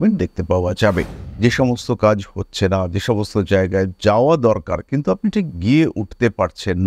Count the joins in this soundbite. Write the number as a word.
one